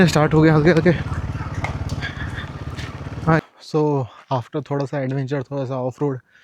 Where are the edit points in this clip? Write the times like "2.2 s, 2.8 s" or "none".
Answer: 3.4 s